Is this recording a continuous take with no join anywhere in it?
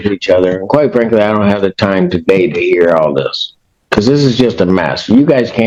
yes; 0 cuts

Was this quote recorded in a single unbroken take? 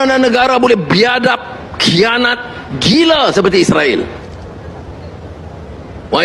yes; 0 cuts

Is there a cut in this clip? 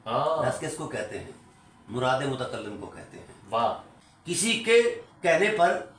yes; 1 cut; at 3.9 s

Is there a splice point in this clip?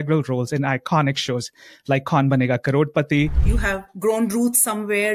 yes; 1 cut; at 3.4 s

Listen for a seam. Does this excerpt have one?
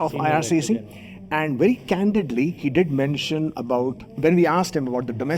no; 0 cuts

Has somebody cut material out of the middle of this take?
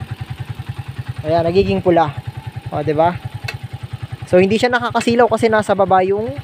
no; 0 cuts

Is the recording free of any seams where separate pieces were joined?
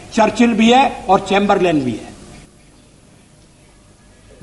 yes; 0 cuts

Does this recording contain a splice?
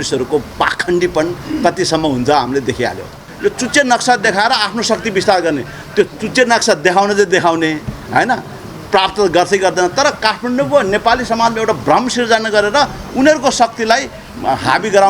yes; 1 cut; at 3.2 s

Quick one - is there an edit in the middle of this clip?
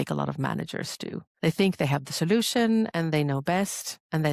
yes; 1 cut; at 1.3 s

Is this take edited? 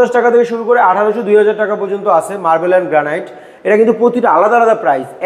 no; 0 cuts

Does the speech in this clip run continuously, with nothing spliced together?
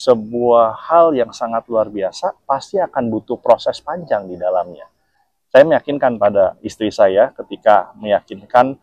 yes; 0 cuts

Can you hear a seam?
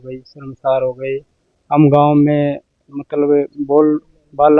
no; 0 cuts

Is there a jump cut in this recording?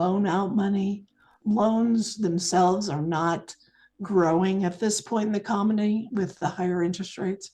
yes; 1 cut; at 1.2 s

